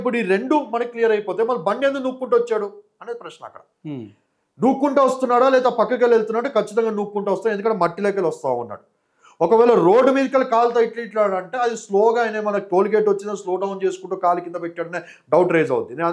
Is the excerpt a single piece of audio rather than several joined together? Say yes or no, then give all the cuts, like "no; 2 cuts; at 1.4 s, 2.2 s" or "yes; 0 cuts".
yes; 0 cuts